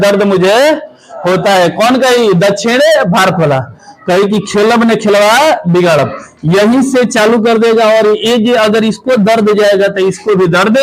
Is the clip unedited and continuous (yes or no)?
yes